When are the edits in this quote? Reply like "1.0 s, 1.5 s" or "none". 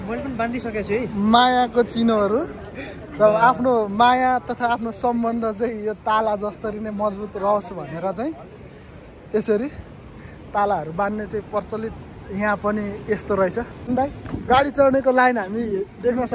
13.9 s